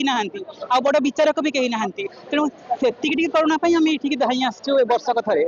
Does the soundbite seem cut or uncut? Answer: uncut